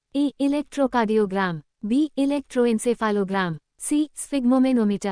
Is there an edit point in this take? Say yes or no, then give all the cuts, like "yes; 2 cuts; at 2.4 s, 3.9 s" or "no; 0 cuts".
no; 0 cuts